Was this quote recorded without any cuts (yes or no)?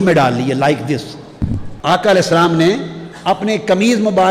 no